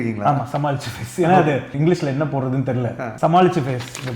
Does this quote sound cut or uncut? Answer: cut